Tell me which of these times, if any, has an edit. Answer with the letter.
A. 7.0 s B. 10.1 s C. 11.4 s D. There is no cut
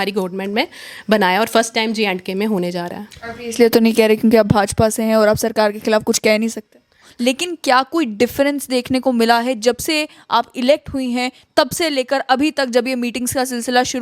A